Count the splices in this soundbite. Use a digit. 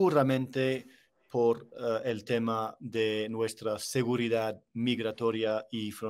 0